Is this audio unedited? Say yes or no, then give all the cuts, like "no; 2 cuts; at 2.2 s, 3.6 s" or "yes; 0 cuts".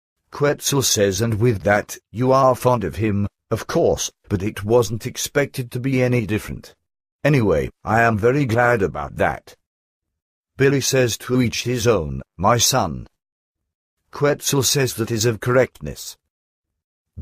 yes; 0 cuts